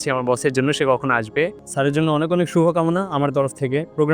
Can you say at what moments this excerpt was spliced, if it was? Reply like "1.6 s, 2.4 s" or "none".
1.6 s

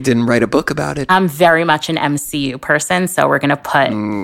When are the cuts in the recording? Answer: 1.0 s

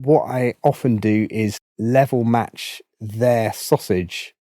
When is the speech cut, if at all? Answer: 1.7 s

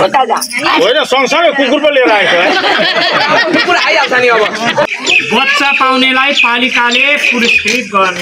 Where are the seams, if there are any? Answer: 4.9 s

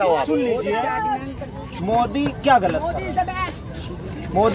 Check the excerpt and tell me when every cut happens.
none

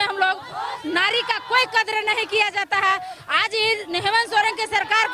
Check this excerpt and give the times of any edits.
none

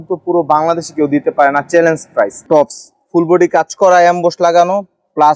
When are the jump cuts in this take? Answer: 2.4 s

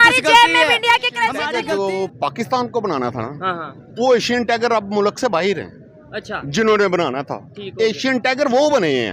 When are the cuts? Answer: 1.4 s

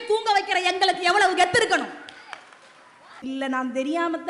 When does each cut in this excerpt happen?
3.2 s

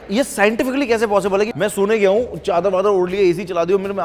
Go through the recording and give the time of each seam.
1.5 s

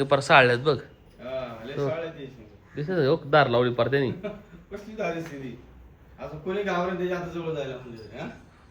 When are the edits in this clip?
none

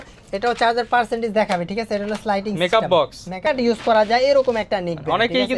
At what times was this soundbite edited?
3.5 s

